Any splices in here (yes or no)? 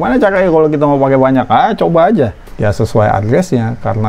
yes